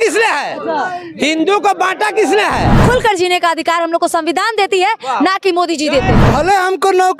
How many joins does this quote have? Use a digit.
2